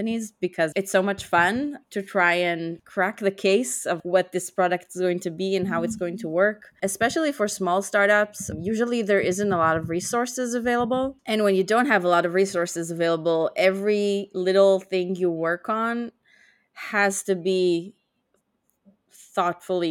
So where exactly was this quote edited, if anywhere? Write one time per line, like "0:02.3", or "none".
0:06.7
0:08.4